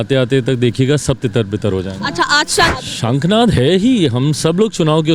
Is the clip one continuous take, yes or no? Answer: no